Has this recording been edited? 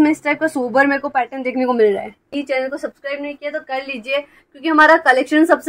yes; 1 cut; at 2.3 s

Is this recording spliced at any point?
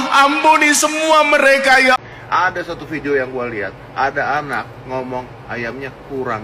yes; 1 cut; at 2.0 s

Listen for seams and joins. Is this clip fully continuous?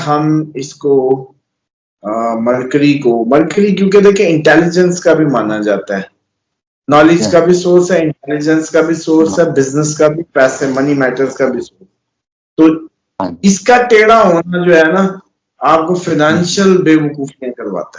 yes; 0 cuts

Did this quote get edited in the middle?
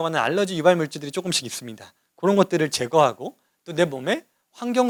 no; 0 cuts

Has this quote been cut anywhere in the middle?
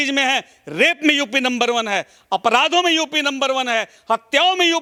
no; 0 cuts

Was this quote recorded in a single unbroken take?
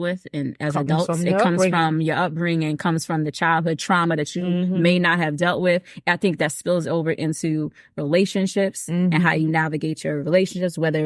yes; 0 cuts

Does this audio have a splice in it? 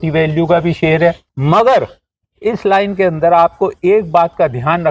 yes; 1 cut; at 1.3 s

